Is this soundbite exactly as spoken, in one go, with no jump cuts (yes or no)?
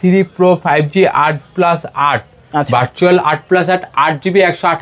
yes